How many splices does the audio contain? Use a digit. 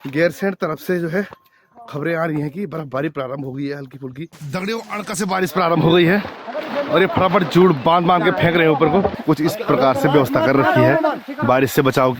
2